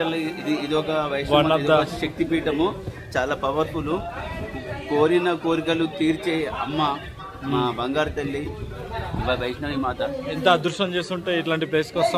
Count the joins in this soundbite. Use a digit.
0